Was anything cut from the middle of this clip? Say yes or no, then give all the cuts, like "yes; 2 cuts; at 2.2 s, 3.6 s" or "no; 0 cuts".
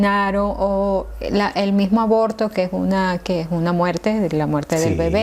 no; 0 cuts